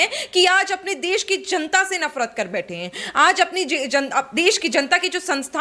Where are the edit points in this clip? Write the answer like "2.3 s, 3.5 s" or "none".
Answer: none